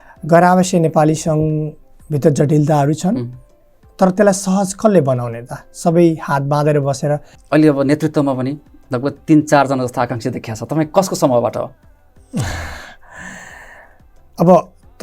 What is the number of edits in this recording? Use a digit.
1